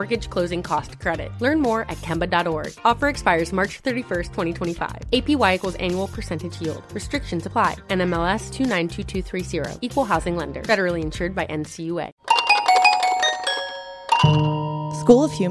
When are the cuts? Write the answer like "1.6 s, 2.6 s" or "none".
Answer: 12.1 s